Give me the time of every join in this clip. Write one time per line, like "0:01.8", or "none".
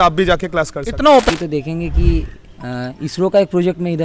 0:01.3